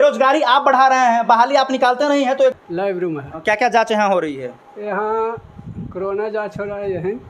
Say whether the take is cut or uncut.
cut